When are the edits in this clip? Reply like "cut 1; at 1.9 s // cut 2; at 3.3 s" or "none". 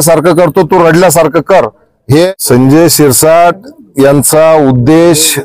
cut 1; at 2.3 s